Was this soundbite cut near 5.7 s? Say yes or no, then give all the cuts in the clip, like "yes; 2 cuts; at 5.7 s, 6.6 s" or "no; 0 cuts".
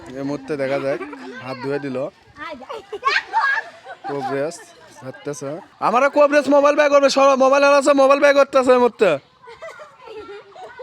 yes; 1 cut; at 5.7 s